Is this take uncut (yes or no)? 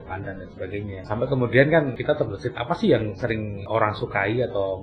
no